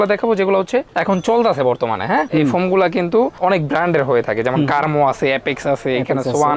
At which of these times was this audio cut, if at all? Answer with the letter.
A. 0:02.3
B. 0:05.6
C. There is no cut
A